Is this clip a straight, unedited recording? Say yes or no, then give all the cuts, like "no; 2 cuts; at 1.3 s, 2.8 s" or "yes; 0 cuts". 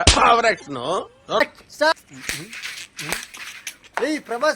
no; 1 cut; at 1.9 s